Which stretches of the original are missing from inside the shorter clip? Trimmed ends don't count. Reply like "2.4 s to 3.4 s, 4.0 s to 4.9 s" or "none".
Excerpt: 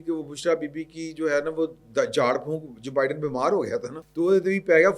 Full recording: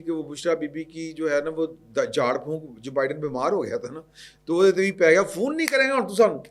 4.0 s to 4.3 s